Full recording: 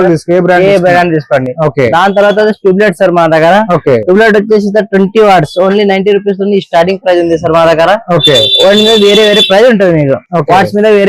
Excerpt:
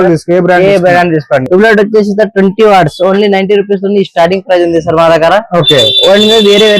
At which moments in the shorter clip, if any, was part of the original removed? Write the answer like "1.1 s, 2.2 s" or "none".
1.5 s